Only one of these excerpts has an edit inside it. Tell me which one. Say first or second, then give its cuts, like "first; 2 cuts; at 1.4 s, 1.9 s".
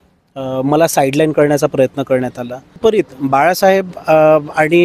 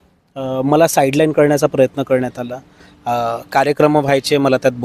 first; 1 cut; at 2.8 s